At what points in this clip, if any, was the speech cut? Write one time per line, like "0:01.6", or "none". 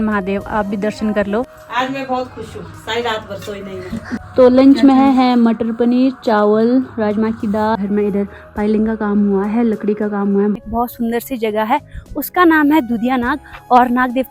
0:01.6
0:04.2
0:07.8
0:10.6